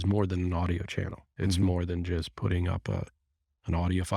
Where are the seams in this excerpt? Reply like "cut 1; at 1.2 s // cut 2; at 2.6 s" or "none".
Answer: cut 1; at 1.2 s